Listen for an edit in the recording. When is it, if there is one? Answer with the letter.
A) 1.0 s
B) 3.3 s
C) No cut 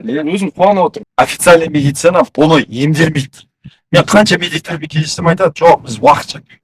A